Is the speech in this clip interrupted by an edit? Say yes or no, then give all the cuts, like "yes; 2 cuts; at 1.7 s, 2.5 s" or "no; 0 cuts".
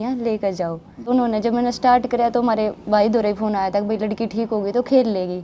yes; 1 cut; at 1.1 s